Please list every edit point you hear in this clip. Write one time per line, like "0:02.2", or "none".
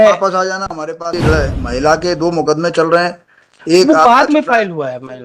0:01.1